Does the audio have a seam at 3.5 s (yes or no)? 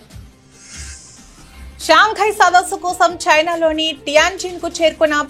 no